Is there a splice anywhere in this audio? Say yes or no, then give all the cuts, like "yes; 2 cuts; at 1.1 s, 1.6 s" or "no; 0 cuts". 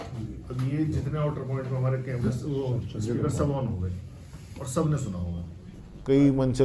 yes; 1 cut; at 5.6 s